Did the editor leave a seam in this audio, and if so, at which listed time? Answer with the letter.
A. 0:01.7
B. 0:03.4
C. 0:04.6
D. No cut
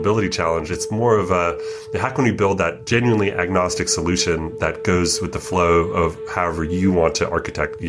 D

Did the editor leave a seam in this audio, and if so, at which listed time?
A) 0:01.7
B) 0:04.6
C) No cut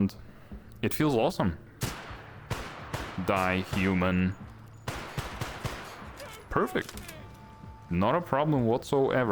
A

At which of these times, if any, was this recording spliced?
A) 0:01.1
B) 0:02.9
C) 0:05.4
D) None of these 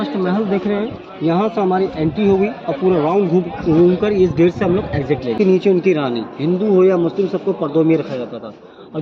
C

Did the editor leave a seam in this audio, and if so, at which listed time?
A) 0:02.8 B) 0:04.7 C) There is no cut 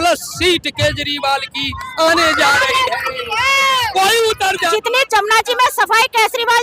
B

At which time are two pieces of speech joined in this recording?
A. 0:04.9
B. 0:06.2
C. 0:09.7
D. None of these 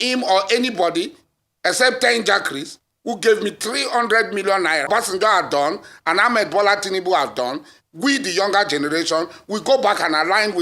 A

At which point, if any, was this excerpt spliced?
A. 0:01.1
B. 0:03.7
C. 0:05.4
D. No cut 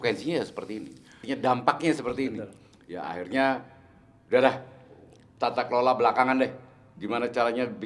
A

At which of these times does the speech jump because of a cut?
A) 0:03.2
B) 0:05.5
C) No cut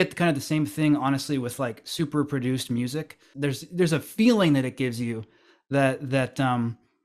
A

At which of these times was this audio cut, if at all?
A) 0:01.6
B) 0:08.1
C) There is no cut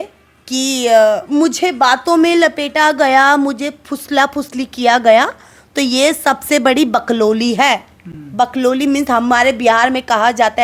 C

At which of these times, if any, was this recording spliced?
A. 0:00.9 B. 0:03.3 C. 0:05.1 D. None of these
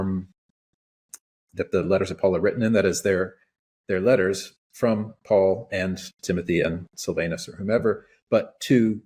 D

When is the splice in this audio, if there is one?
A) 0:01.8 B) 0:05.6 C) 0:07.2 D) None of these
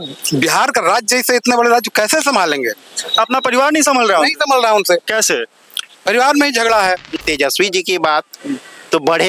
C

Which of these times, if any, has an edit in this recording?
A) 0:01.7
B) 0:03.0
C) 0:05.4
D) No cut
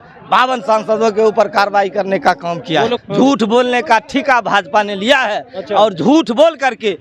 B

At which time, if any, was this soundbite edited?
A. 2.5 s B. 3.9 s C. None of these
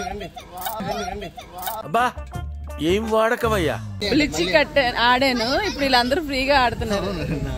B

